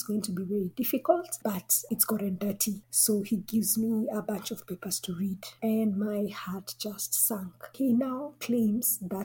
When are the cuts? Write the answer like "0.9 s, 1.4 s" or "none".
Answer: 1.3 s, 7.7 s